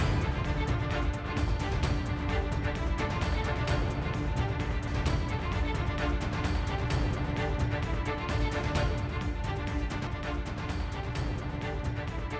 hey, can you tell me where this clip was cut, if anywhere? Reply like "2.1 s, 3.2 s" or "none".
10.1 s